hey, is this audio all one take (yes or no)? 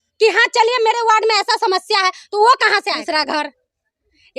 no